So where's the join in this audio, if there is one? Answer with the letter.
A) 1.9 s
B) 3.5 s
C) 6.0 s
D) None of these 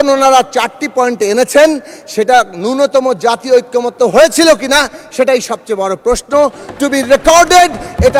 D